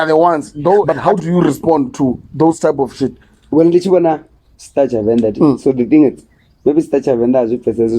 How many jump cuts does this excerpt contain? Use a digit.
1